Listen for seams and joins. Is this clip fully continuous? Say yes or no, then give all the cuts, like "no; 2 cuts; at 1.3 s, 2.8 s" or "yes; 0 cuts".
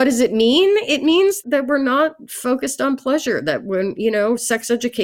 yes; 0 cuts